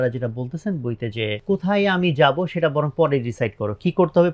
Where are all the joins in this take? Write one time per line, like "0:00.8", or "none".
0:01.4